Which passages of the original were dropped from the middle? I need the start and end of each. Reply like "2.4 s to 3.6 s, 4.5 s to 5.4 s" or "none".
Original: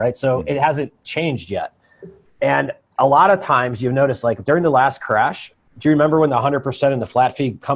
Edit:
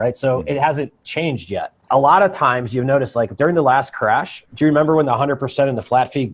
1.8 s to 2.8 s, 5.5 s to 5.6 s